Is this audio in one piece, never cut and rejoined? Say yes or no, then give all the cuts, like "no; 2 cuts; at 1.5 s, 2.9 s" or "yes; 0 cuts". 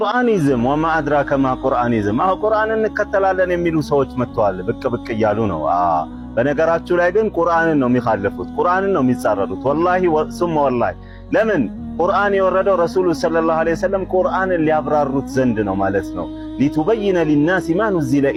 yes; 0 cuts